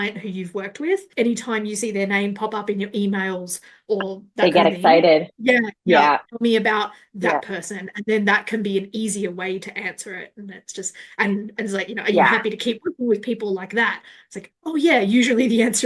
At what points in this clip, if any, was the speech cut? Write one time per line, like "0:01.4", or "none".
0:01.1